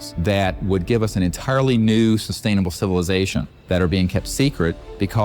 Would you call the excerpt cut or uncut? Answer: cut